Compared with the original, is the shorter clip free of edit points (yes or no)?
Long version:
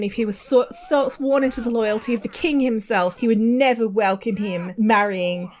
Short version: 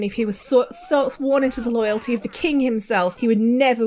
yes